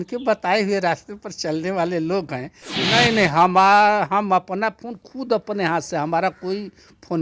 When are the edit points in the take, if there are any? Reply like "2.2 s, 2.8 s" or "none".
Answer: 2.8 s